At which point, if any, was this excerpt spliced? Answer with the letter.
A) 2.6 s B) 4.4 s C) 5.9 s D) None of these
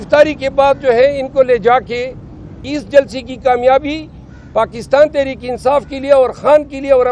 A